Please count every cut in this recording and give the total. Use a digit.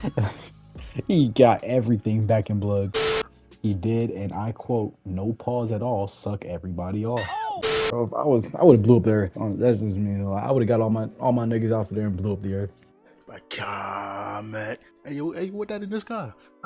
2